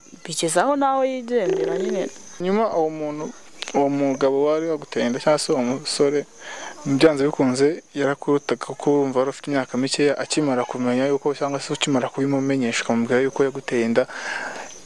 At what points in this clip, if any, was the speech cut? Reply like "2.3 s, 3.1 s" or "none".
2.4 s